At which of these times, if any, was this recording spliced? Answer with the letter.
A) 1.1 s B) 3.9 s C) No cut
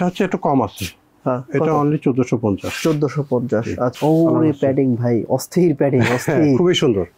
B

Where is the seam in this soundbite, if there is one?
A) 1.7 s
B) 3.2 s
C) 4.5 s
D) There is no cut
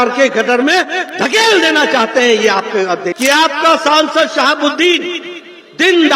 B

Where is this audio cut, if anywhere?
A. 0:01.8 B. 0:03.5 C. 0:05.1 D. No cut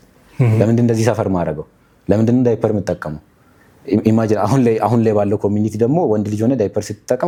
D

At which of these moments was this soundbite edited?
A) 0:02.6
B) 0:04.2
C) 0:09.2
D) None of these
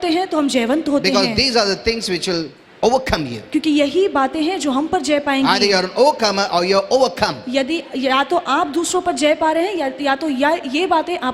A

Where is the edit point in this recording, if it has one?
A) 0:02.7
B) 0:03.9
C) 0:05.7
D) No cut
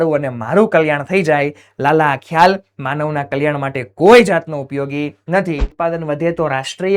C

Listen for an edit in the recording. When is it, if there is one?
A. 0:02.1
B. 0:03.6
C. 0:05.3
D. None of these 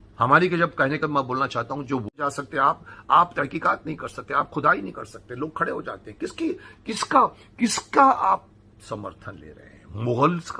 A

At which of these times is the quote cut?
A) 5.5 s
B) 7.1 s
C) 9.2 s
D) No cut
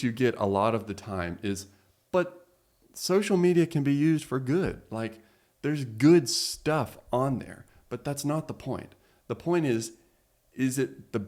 D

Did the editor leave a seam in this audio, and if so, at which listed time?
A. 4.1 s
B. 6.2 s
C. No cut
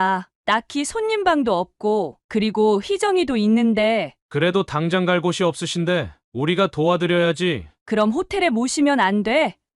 A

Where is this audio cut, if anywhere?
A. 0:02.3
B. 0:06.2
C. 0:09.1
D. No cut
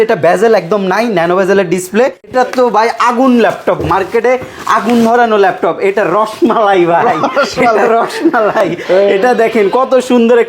A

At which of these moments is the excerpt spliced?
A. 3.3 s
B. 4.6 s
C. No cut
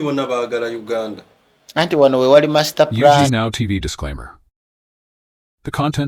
A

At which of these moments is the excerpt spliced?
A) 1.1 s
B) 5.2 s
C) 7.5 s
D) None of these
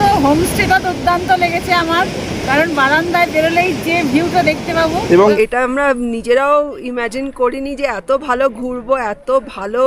B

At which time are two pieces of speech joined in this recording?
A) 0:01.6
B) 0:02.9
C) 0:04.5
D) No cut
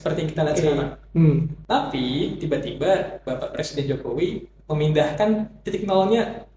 A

